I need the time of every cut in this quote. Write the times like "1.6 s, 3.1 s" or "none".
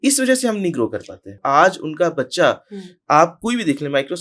1.4 s